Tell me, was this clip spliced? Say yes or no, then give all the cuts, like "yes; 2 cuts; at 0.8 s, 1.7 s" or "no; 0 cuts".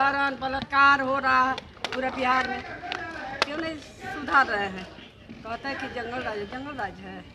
no; 0 cuts